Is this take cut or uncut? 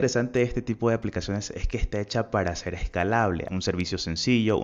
cut